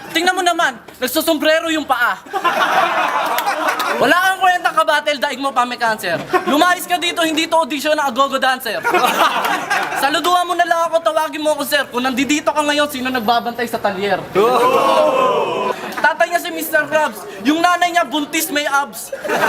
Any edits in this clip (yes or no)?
yes